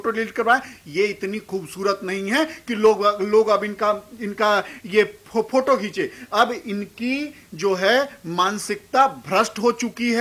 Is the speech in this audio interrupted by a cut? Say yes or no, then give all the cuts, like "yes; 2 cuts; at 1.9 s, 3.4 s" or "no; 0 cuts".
no; 0 cuts